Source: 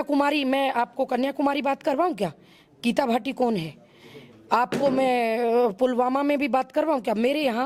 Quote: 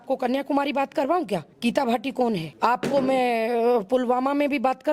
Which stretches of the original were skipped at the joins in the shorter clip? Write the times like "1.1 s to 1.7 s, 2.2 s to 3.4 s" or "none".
2.4 s to 2.7 s, 3.7 s to 4.4 s